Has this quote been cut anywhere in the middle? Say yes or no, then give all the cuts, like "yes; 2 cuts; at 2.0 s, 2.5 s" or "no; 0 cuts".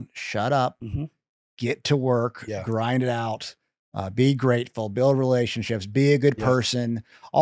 no; 0 cuts